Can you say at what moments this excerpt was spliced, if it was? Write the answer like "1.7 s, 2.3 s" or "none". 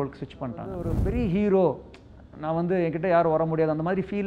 1.0 s